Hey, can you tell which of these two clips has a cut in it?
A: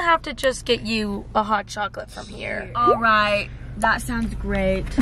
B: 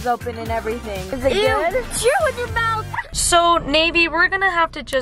B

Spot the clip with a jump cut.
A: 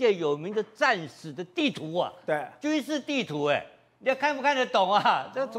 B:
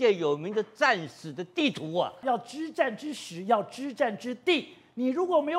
B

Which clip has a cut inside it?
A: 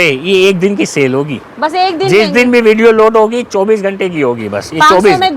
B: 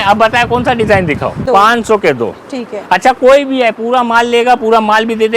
B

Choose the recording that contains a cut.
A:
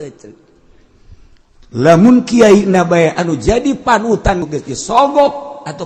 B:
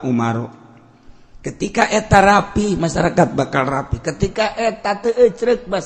A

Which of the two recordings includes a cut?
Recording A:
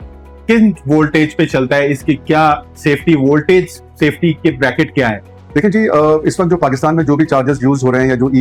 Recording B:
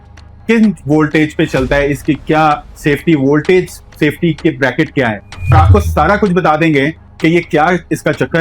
B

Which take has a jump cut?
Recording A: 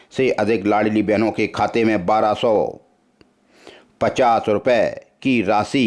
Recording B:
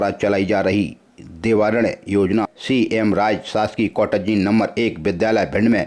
B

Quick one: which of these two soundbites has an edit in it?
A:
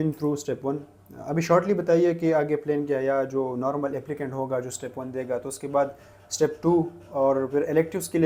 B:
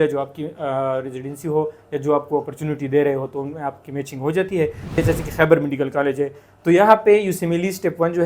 B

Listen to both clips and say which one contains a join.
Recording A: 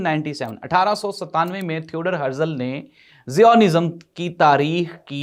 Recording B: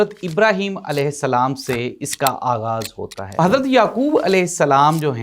B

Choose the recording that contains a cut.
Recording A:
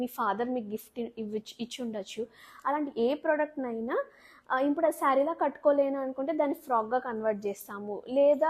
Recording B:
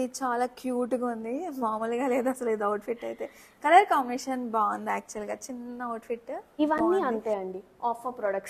B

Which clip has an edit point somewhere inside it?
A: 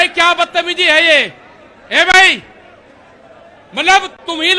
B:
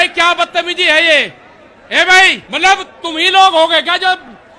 B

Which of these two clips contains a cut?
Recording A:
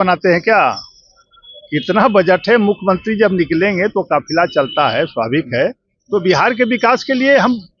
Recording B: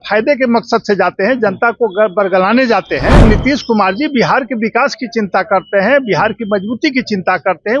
B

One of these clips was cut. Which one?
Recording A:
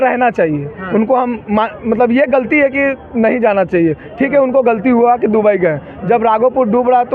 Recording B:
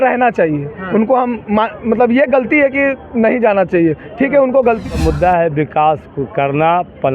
B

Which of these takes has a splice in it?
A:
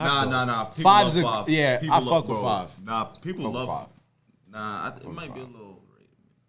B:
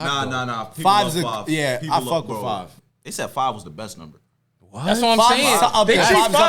B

